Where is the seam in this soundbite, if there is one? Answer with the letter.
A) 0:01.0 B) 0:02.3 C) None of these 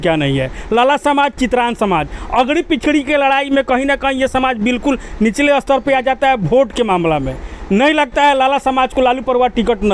C